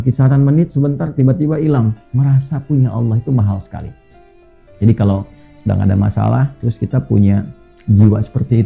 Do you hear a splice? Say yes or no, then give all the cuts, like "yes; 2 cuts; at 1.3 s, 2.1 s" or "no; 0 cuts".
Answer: yes; 1 cut; at 2.0 s